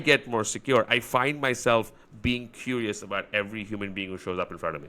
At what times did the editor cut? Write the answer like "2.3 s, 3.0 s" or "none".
none